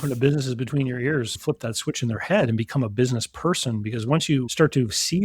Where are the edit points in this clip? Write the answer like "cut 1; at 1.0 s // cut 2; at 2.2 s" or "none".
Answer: cut 1; at 1.3 s